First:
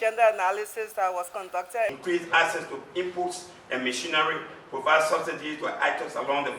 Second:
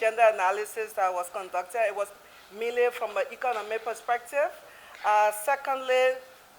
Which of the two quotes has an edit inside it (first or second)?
first